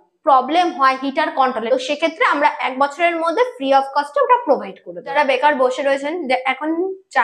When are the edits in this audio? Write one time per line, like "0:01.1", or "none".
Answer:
0:01.6
0:05.1